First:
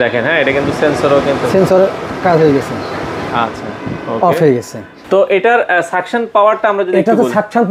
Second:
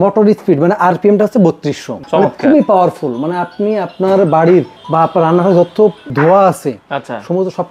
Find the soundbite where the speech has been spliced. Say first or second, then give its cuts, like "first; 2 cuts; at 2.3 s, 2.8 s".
second; 2 cuts; at 1.9 s, 6.0 s